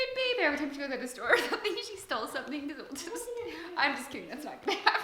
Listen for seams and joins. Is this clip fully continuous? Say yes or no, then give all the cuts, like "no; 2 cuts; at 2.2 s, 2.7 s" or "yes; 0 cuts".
yes; 0 cuts